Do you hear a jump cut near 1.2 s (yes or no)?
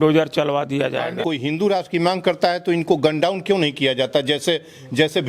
yes